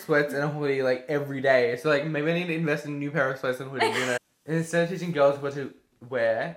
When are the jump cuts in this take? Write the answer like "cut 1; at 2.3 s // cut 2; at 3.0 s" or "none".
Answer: cut 1; at 4.2 s